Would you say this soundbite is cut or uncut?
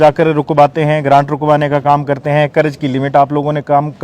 uncut